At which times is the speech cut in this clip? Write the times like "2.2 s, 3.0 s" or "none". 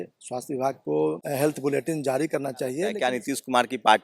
1.2 s, 2.9 s